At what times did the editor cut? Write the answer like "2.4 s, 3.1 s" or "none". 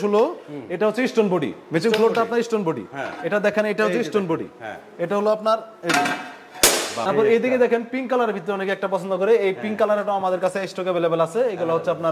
7.1 s

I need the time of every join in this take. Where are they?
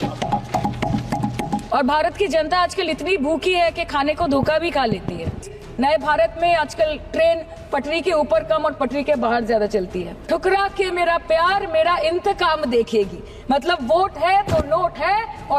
1.6 s, 5.6 s, 10.1 s

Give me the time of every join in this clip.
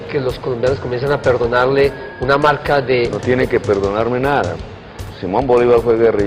5.1 s

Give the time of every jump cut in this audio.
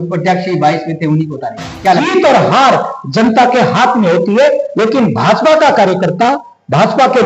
none

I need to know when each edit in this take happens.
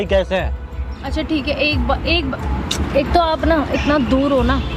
none

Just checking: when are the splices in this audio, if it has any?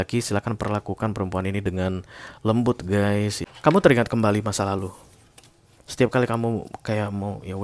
3.4 s

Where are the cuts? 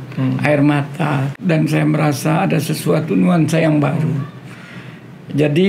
1.3 s

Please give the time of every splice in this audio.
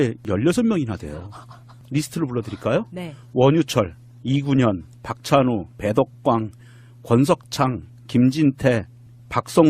3.4 s

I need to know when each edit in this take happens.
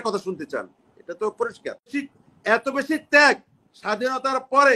1.9 s

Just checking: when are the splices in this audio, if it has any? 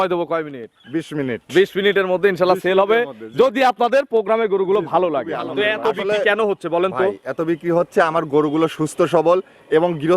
5.4 s

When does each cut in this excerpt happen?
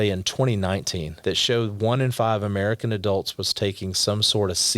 1.0 s

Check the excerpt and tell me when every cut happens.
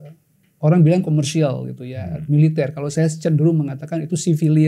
none

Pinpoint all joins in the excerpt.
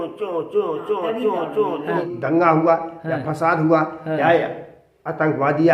2.1 s

